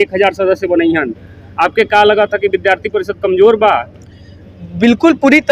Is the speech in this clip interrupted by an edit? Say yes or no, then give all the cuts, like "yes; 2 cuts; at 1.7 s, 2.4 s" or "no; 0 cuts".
no; 0 cuts